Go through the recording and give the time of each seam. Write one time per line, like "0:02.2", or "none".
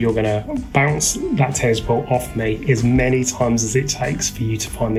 none